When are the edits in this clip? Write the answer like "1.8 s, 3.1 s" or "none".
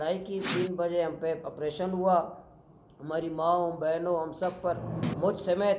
none